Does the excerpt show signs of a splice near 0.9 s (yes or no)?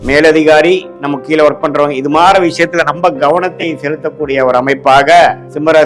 yes